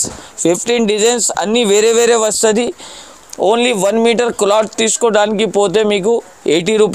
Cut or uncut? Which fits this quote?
uncut